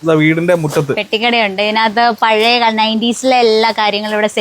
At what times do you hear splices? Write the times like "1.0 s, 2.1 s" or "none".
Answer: none